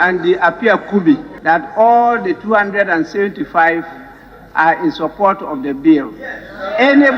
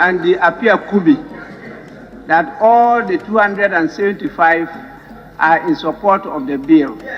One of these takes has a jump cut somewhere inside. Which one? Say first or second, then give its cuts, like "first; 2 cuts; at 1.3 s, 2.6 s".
first; 1 cut; at 1.3 s